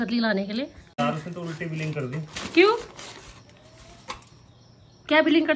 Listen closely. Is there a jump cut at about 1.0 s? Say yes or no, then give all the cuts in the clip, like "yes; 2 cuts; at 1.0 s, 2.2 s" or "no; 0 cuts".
yes; 1 cut; at 1.0 s